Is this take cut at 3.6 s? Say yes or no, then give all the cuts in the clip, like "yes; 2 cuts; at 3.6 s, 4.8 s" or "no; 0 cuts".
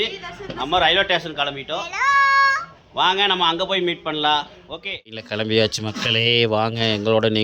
no; 1 cut; at 5.3 s